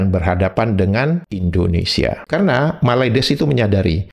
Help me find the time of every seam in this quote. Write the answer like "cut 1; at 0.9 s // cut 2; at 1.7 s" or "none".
cut 1; at 2.2 s